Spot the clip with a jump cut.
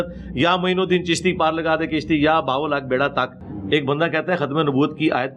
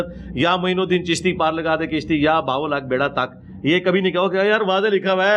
first; 1 cut; at 3.4 s

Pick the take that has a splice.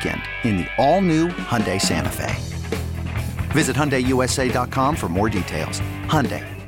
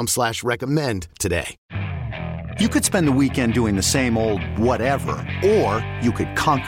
second; 1 cut; at 1.6 s

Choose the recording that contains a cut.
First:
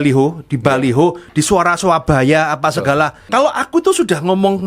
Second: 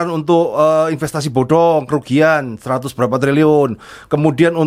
first; 1 cut; at 3.2 s

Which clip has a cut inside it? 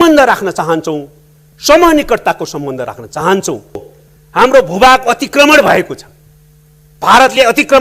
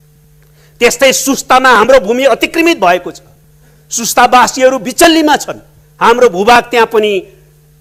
first; 1 cut; at 3.9 s

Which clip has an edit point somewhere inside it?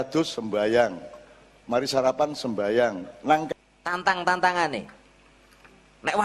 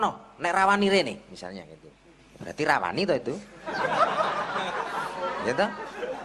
first; 1 cut; at 3.5 s

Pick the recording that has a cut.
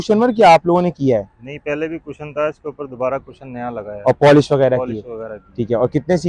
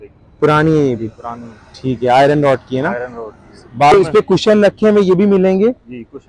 second; 1 cut; at 3.9 s

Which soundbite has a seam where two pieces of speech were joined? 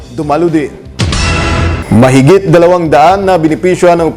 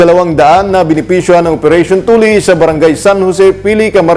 first; 1 cut; at 1.2 s

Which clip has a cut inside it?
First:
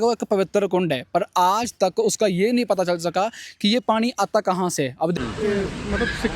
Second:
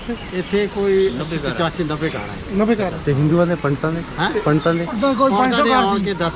first; 1 cut; at 5.2 s

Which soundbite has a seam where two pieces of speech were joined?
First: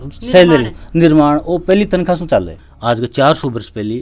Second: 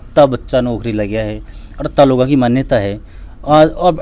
first; 1 cut; at 2.6 s

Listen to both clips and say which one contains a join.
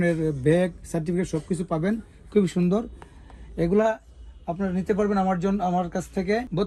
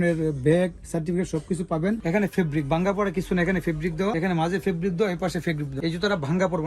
second; 1 cut; at 2.0 s

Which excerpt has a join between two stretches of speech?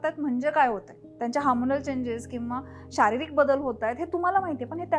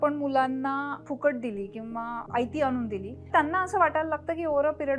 second; 3 cuts; at 1.0 s, 2.2 s, 3.3 s

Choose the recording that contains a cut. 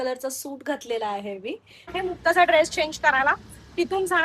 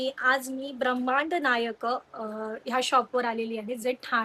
first; 1 cut; at 2.0 s

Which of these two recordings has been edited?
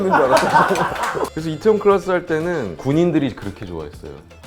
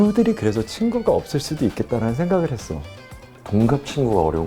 first; 2 cuts; at 1.2 s, 2.7 s

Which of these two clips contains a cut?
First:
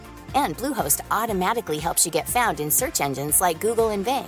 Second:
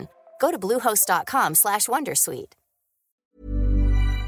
second; 1 cut; at 3.3 s

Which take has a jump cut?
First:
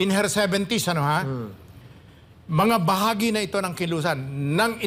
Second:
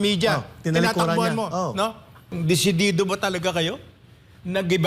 second; 1 cut; at 2.3 s

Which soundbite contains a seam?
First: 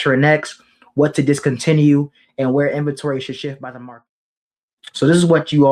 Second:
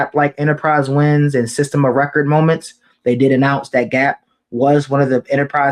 first; 1 cut; at 3.8 s

